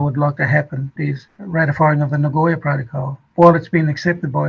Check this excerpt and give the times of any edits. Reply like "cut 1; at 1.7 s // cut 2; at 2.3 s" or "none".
cut 1; at 1.0 s